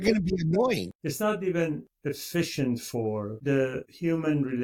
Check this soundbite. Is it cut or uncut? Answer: cut